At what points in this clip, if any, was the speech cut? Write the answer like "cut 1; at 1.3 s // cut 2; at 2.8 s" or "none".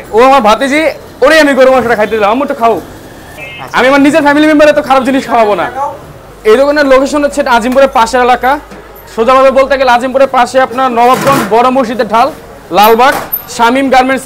none